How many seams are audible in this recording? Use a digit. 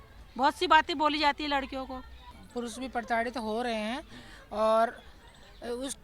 1